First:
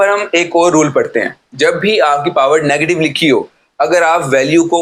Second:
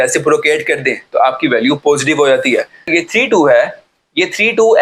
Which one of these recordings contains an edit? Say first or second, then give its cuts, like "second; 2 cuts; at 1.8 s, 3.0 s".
second; 1 cut; at 2.9 s